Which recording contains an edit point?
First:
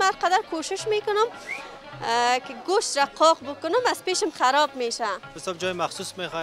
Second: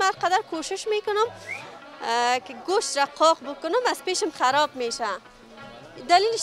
first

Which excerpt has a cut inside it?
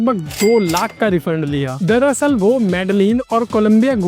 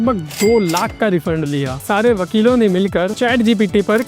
second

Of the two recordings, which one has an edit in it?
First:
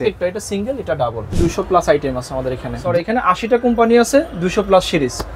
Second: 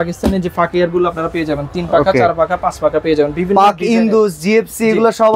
first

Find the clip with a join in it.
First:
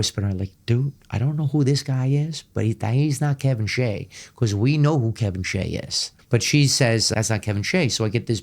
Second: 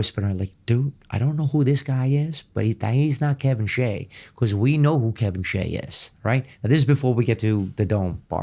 first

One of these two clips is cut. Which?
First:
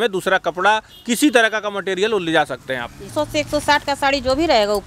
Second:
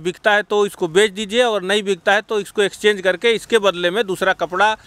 first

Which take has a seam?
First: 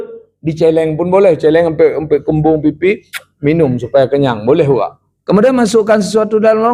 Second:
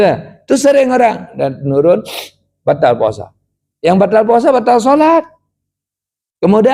first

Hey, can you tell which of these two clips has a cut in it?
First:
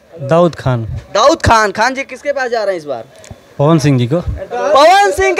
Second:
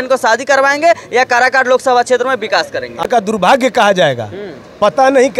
second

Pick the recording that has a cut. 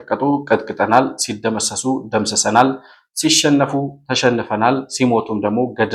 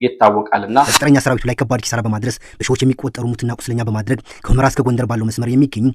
second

